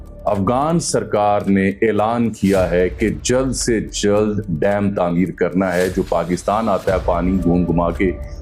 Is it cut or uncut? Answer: uncut